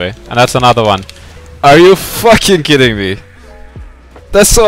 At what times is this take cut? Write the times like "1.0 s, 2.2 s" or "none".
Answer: none

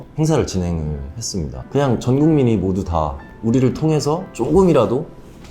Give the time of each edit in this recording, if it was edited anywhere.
1.6 s

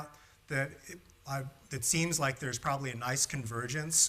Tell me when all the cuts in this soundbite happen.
2.2 s

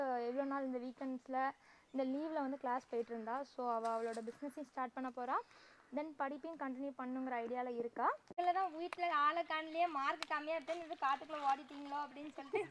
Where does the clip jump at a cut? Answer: 8.3 s

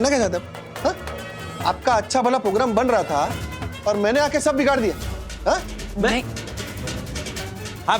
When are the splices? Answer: none

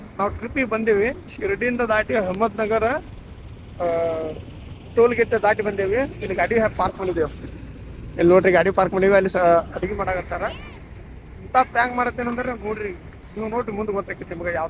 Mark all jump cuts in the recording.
none

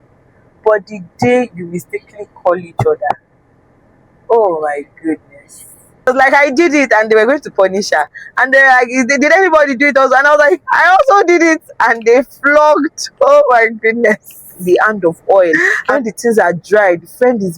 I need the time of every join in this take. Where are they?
6.1 s, 14.5 s

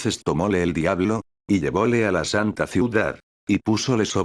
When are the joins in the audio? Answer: 2.8 s

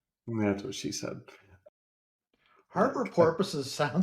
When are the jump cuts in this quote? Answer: 1.6 s

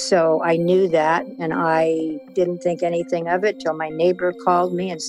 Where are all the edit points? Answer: 1.5 s

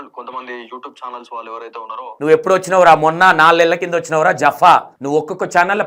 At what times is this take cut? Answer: 2.1 s

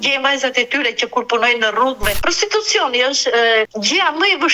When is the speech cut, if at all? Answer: 2.2 s, 3.7 s

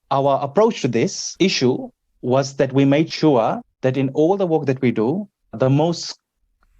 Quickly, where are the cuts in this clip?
1.2 s, 3.1 s, 3.7 s, 5.6 s

